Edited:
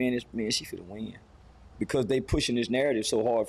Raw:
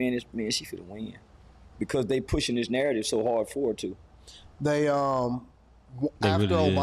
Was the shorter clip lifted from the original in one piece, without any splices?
yes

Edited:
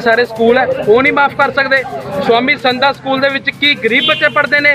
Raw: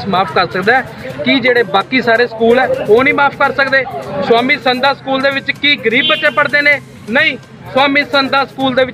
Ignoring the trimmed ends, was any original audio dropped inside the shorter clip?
no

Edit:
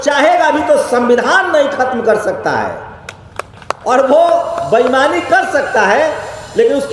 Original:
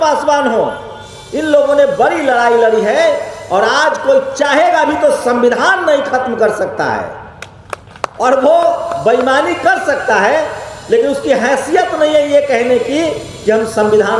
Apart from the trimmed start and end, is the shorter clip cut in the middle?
no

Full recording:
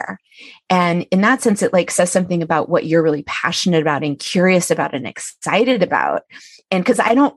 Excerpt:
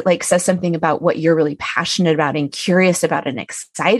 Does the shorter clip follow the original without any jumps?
yes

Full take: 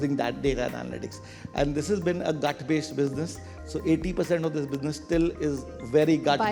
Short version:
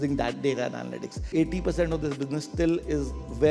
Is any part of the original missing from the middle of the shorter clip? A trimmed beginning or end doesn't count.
yes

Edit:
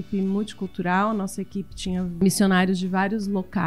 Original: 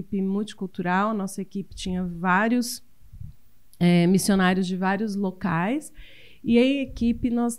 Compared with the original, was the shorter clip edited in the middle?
yes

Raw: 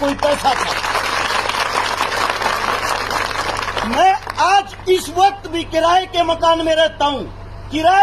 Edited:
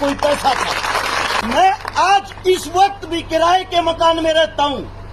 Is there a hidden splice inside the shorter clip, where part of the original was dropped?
yes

